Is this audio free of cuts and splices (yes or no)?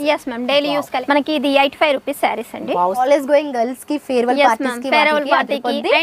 no